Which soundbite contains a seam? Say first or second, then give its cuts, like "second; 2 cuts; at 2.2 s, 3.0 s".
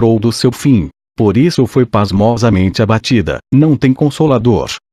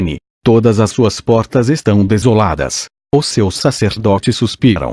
first; 1 cut; at 2.5 s